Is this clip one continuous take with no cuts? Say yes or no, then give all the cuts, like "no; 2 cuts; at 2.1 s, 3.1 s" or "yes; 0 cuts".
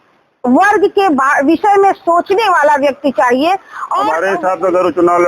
no; 1 cut; at 4.1 s